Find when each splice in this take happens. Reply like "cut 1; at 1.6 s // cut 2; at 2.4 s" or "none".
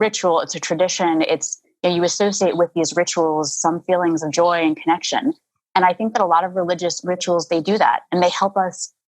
none